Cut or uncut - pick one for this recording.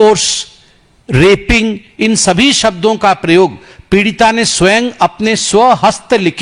uncut